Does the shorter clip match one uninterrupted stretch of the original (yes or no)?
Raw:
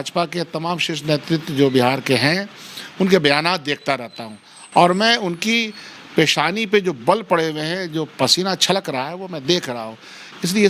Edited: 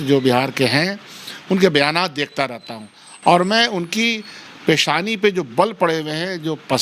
yes